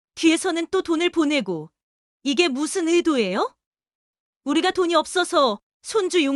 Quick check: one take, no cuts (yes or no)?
yes